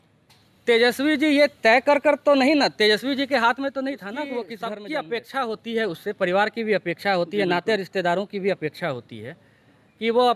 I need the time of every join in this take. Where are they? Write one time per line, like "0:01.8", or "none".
0:04.5